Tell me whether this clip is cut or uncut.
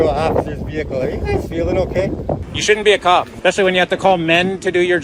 cut